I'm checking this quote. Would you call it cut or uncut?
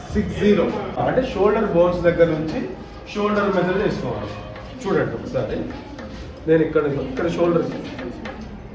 cut